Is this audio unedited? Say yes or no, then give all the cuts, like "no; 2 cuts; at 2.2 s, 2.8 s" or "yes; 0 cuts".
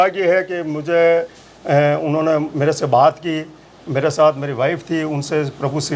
yes; 0 cuts